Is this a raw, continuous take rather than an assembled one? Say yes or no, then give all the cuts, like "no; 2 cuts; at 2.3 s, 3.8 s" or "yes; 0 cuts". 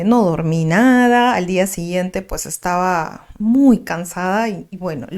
yes; 0 cuts